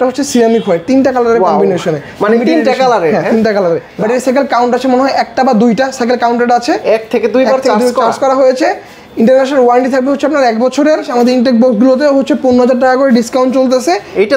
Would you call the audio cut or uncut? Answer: cut